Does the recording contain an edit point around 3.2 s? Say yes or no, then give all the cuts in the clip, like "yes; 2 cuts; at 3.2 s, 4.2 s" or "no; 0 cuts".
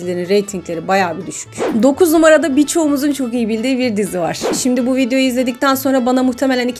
no; 2 cuts; at 1.4 s, 4.5 s